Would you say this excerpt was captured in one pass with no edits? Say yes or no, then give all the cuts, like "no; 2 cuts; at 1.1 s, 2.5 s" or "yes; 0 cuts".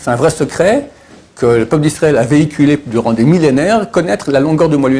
yes; 0 cuts